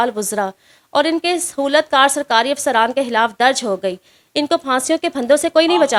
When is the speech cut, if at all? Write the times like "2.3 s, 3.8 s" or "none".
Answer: none